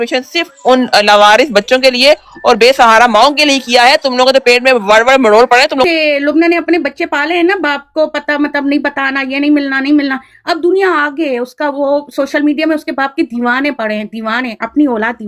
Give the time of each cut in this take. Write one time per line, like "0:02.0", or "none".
0:05.8